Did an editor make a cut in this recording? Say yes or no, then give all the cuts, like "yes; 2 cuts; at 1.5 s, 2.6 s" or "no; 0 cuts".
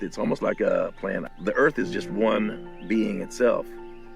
yes; 1 cut; at 1.3 s